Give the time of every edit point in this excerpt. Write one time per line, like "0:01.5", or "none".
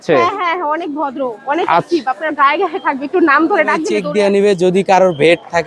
0:03.9